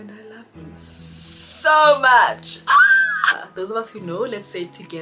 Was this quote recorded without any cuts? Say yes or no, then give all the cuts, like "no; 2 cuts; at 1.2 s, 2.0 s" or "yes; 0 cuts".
no; 1 cut; at 3.4 s